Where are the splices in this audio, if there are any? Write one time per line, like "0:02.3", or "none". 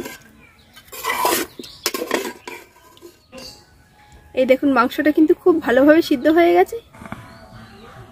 0:03.3
0:06.9